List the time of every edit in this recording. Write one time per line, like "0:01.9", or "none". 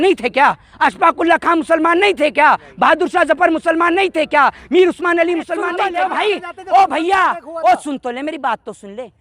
0:05.8